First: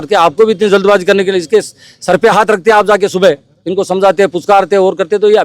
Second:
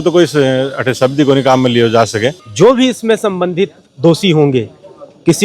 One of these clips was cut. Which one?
second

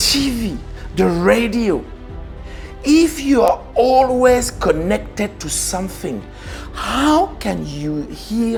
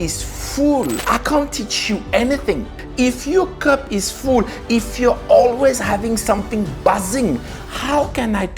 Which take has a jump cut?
second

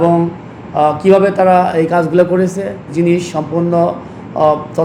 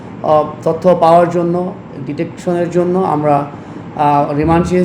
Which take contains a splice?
first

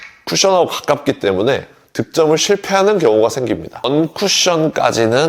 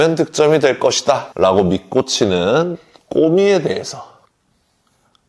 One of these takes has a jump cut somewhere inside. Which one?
first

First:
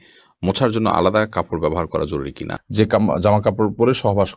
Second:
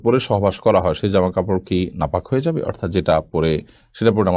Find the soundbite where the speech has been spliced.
first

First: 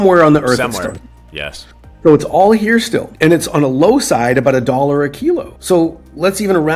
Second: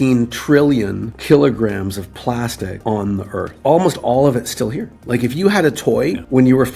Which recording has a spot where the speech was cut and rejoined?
second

